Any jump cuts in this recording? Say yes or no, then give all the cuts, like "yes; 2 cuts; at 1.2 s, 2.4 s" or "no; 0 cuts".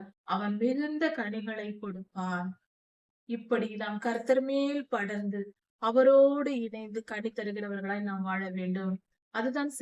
no; 0 cuts